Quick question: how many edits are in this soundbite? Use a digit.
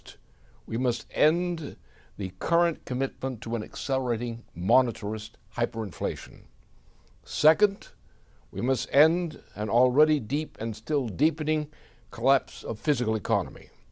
1